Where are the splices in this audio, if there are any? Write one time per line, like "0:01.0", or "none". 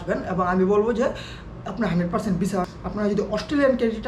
0:02.6